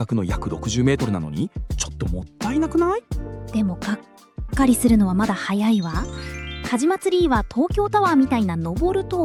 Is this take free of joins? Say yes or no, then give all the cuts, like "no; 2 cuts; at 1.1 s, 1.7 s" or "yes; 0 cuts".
yes; 0 cuts